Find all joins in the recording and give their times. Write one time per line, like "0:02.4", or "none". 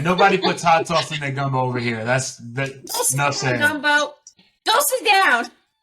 0:04.4